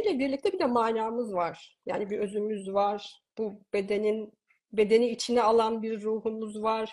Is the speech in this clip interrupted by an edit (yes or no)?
no